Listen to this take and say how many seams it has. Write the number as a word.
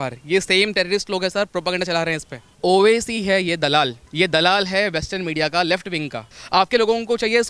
three